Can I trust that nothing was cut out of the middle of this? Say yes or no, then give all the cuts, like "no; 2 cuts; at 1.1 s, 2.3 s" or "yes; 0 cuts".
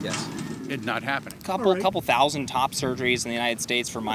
no; 1 cut; at 1.3 s